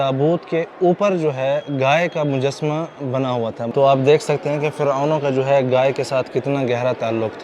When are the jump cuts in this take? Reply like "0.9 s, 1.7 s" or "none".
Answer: 3.6 s